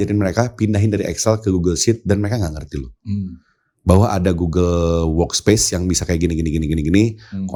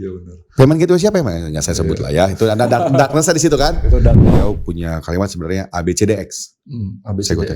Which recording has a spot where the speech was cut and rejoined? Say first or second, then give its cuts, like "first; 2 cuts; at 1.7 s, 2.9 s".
second; 1 cut; at 4.2 s